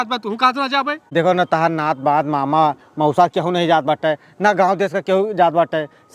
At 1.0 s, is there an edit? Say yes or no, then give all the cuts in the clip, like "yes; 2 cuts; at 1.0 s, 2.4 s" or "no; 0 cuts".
yes; 1 cut; at 1.0 s